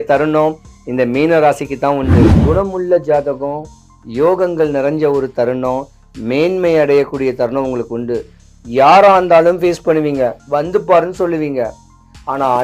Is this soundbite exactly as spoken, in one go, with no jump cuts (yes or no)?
no